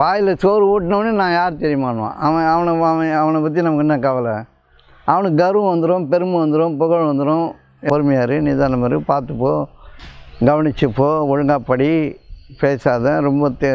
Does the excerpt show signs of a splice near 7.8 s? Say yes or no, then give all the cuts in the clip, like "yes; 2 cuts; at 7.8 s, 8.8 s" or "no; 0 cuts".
yes; 1 cut; at 7.8 s